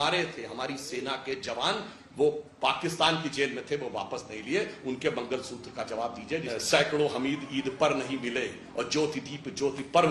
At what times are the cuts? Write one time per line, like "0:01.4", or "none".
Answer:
0:06.5